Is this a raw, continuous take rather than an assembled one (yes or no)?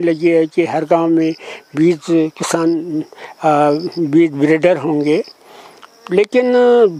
yes